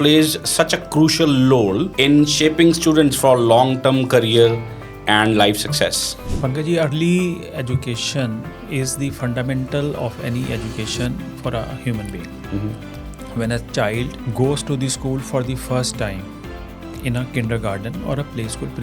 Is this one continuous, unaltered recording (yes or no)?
no